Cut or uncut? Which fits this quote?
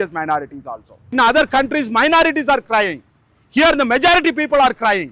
cut